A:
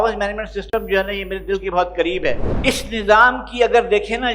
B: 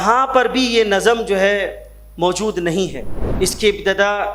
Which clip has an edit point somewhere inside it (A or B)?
A